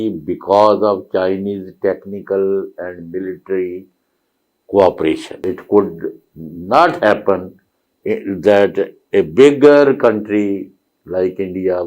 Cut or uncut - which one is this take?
cut